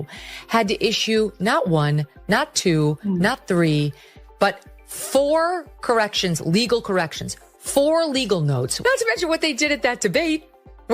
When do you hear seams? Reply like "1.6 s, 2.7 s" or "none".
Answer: 8.7 s